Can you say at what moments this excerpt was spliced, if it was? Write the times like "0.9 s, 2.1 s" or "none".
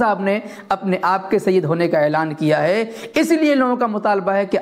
none